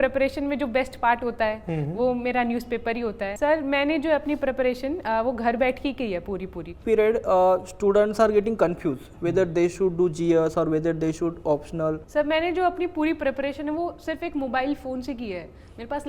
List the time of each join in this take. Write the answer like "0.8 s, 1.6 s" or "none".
3.3 s, 6.7 s, 12.0 s